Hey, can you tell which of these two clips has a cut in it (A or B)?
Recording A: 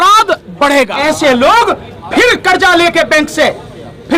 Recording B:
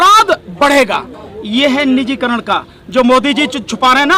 A